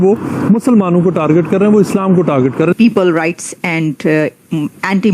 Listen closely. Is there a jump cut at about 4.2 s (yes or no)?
no